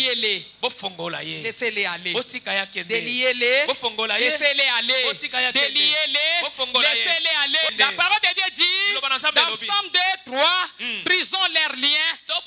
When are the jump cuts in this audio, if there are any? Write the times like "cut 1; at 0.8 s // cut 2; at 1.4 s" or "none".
cut 1; at 7.7 s